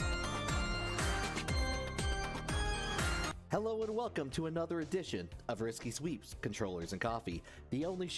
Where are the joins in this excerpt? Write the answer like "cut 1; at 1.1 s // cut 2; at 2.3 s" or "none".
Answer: cut 1; at 3.4 s